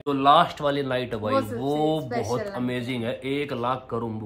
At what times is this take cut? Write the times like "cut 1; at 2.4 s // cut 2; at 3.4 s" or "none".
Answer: none